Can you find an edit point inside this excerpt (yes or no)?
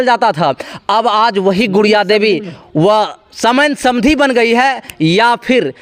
no